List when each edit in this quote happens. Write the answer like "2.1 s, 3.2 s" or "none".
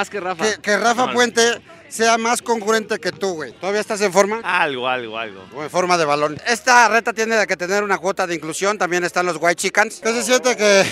3.5 s, 6.2 s, 10.0 s